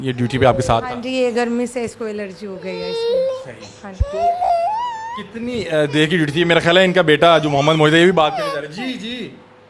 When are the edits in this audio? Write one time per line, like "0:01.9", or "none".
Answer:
none